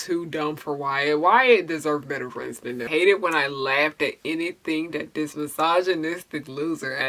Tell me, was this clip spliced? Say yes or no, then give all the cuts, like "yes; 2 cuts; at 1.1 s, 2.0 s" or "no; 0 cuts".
yes; 1 cut; at 2.8 s